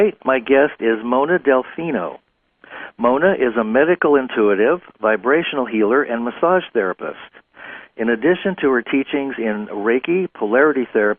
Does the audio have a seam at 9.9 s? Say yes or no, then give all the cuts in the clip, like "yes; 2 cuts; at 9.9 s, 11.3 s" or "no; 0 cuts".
yes; 1 cut; at 9.9 s